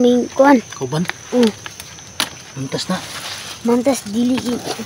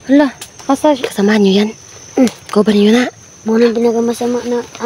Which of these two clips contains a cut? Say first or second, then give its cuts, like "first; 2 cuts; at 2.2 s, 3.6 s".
second; 1 cut; at 1.1 s